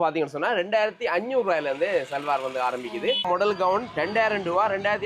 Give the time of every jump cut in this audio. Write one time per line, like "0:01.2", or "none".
0:03.3

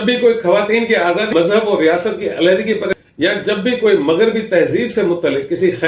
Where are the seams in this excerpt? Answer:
0:01.3
0:02.9

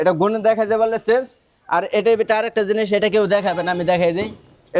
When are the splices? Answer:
none

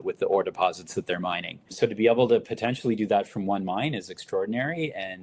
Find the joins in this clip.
0:01.7

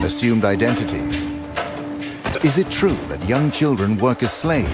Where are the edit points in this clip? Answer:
0:03.2

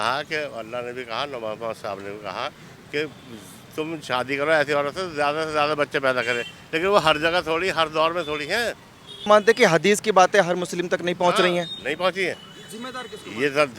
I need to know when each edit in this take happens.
0:09.3

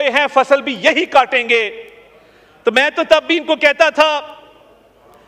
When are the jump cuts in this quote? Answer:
none

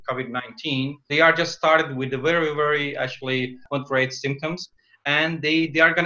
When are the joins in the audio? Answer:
none

